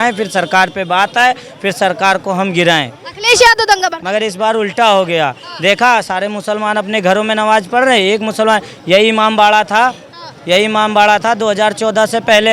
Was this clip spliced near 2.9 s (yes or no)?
no